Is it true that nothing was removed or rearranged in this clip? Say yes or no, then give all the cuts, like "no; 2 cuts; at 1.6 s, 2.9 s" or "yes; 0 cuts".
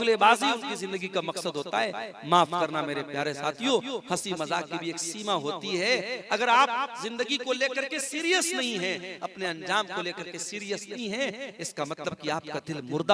yes; 0 cuts